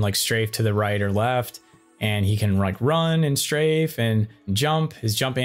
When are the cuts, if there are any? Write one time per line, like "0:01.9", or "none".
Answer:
0:04.5